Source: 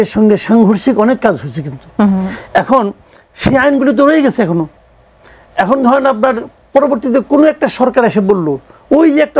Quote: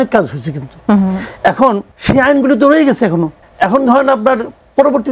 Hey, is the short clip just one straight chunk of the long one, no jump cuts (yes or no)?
no